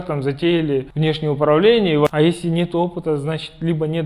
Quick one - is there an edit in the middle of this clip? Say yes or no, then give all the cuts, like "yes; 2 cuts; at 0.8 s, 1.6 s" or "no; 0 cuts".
yes; 2 cuts; at 0.9 s, 2.1 s